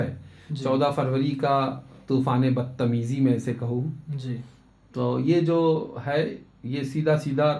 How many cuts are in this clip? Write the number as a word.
zero